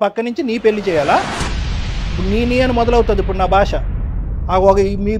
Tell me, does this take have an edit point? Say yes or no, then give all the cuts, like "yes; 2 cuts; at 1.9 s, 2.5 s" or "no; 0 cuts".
no; 0 cuts